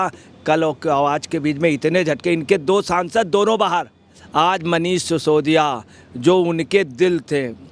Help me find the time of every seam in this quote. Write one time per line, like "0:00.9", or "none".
0:04.2